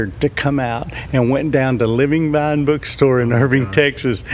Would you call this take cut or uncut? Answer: uncut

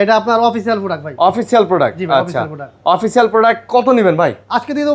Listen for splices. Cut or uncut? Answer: uncut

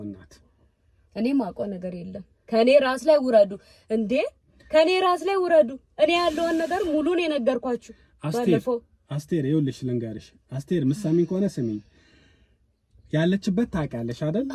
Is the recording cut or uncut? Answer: uncut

